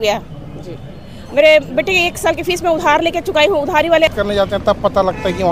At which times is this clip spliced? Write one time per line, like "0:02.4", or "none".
0:04.1